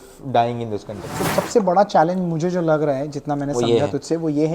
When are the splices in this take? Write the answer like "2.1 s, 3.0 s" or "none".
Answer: 1.1 s